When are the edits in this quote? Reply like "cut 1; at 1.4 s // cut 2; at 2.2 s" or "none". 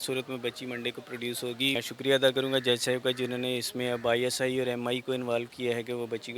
cut 1; at 1.8 s

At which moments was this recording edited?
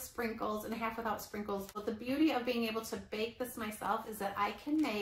cut 1; at 1.8 s

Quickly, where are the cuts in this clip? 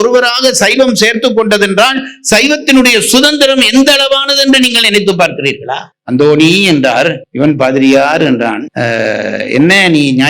cut 1; at 5.9 s

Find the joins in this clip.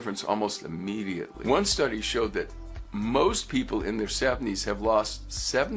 cut 1; at 1.3 s

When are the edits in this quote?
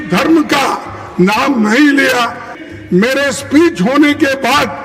cut 1; at 2.7 s

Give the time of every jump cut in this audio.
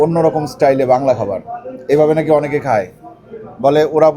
none

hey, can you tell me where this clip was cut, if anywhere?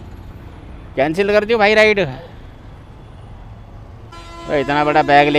cut 1; at 4.1 s

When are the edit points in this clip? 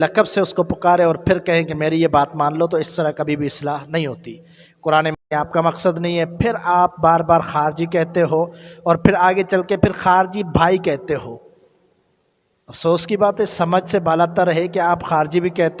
cut 1; at 5.2 s

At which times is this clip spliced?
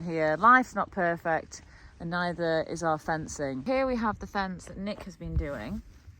cut 1; at 3.6 s

